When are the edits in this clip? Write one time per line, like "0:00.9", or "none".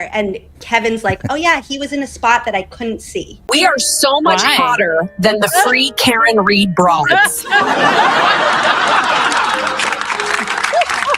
0:03.4